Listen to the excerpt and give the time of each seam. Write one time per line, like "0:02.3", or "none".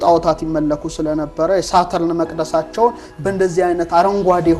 none